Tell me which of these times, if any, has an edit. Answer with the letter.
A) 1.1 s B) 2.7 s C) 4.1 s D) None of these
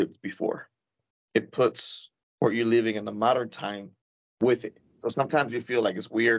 A